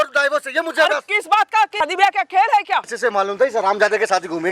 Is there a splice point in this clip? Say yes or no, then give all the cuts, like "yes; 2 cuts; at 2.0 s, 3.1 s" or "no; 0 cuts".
yes; 2 cuts; at 1.8 s, 2.9 s